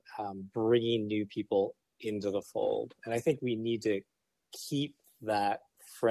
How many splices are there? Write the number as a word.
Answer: zero